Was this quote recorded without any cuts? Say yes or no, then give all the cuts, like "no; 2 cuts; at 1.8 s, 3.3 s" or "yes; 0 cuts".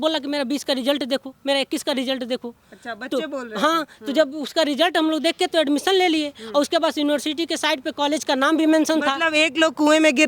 yes; 0 cuts